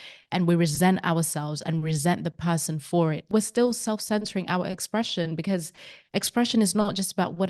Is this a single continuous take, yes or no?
yes